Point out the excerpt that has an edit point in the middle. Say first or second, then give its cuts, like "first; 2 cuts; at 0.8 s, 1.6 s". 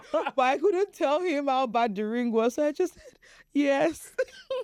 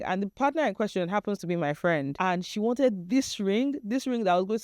second; 1 cut; at 2.1 s